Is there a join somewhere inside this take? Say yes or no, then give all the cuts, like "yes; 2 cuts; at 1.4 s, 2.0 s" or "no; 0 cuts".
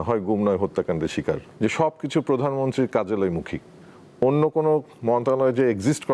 yes; 1 cut; at 1.5 s